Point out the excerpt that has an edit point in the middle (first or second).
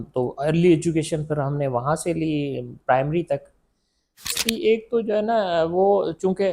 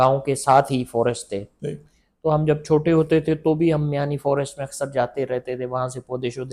first